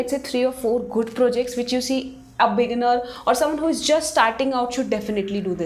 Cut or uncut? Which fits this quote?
uncut